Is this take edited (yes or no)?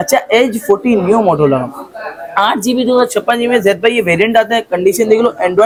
no